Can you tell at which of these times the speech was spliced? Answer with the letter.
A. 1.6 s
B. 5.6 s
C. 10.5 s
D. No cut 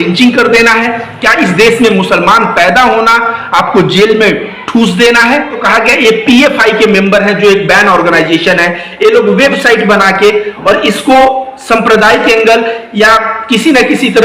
B